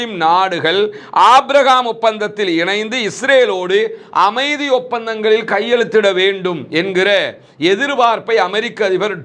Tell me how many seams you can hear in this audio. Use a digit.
0